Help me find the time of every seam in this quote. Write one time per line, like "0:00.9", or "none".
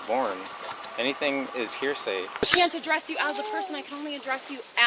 0:02.4